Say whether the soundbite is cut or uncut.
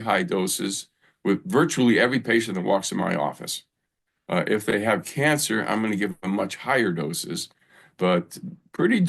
uncut